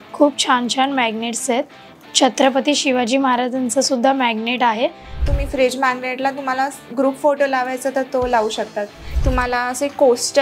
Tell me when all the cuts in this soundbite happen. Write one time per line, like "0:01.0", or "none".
0:05.2
0:09.0